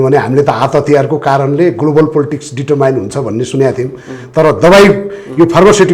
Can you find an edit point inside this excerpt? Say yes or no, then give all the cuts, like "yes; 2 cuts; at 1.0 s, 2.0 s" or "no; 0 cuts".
no; 0 cuts